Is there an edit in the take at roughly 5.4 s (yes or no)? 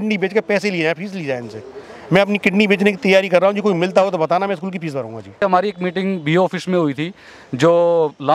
yes